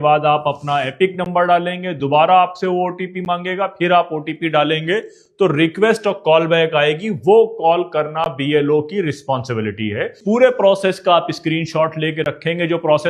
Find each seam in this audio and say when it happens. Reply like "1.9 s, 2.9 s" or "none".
10.2 s